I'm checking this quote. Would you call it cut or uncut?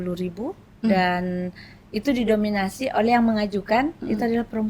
uncut